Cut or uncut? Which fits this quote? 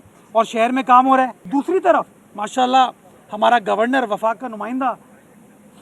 cut